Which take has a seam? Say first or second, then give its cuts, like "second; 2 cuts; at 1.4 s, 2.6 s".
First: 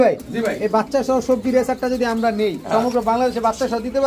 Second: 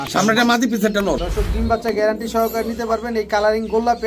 second; 1 cut; at 1.2 s